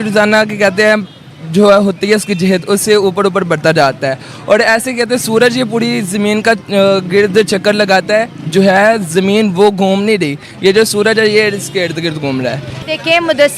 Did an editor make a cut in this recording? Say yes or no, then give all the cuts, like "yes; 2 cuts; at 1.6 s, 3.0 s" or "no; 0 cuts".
yes; 1 cut; at 12.7 s